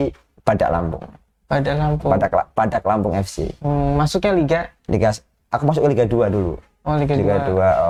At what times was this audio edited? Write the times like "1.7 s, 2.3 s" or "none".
none

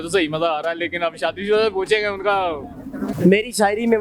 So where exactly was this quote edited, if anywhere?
3.1 s

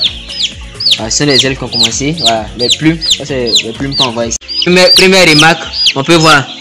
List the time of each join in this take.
4.4 s

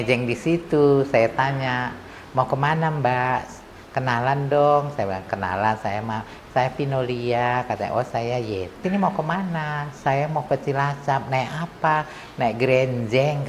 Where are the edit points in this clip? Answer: 8.8 s

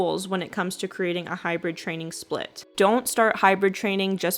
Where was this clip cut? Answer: 2.6 s

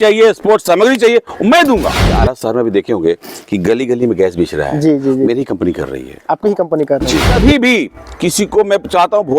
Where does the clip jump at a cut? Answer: 2.1 s, 7.4 s

